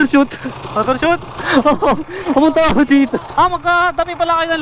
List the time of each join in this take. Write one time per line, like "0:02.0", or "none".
0:03.3